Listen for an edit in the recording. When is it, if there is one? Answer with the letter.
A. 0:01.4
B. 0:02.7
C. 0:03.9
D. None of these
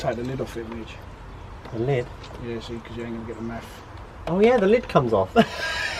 D